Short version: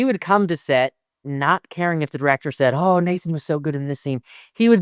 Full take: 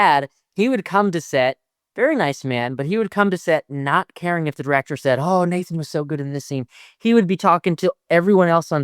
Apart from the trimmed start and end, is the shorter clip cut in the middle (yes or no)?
yes